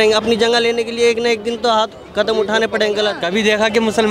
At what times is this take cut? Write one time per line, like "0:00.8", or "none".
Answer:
0:03.2